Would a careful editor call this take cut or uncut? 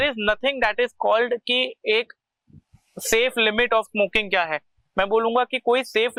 uncut